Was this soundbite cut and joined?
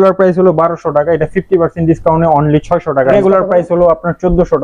yes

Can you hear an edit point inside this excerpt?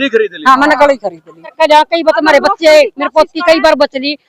yes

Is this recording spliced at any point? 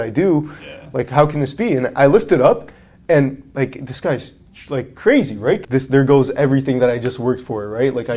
yes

